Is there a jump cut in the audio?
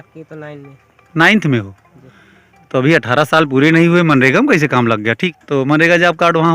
yes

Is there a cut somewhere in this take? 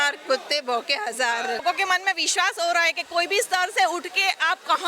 yes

